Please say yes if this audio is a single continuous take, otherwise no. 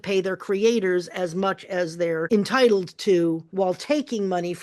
no